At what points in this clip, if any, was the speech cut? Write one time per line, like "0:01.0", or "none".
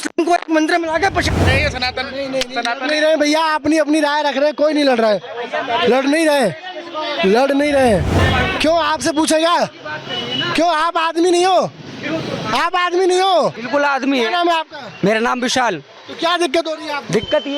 0:01.4
0:08.1
0:13.6